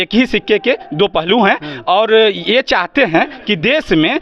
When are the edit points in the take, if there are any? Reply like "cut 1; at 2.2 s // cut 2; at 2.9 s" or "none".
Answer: none